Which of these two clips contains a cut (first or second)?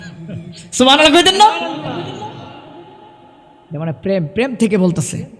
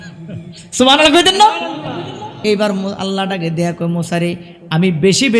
second